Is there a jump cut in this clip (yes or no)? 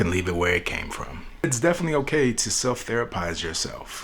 yes